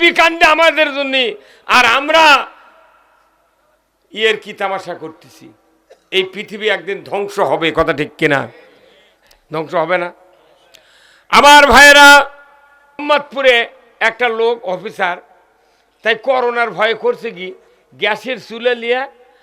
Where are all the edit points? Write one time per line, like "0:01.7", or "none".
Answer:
0:13.0